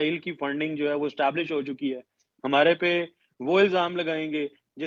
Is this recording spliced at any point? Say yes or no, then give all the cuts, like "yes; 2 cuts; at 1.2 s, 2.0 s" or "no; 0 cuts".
no; 0 cuts